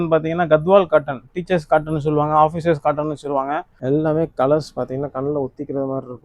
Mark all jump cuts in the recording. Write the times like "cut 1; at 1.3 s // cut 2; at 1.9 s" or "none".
cut 1; at 3.7 s